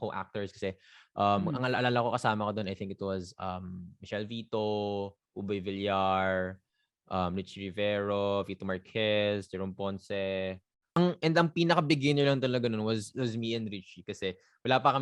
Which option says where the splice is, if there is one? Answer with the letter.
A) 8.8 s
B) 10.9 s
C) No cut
B